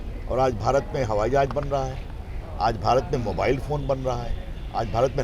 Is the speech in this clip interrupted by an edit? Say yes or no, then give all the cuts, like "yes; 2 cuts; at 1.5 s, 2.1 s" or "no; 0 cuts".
no; 0 cuts